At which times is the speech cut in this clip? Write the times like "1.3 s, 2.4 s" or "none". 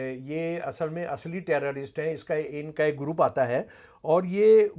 none